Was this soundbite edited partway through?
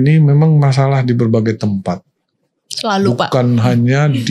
no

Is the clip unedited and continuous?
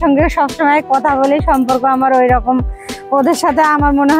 yes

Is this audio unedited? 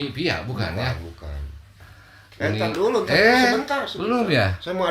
no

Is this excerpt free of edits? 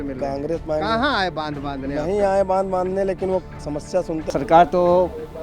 no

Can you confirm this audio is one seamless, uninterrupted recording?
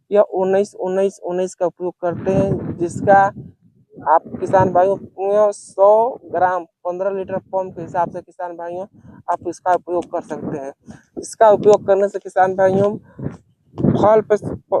yes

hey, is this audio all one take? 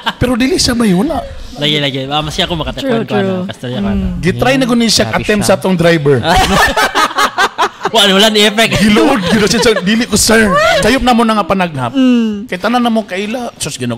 no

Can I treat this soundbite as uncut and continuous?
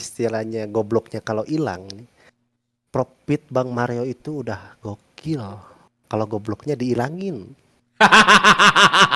yes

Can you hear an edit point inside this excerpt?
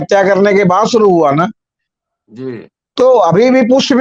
no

